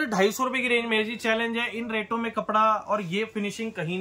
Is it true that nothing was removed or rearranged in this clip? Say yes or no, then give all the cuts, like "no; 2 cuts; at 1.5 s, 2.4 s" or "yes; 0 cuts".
yes; 0 cuts